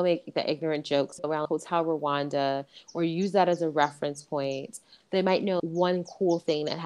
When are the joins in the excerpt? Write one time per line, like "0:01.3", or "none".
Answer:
0:01.2
0:04.9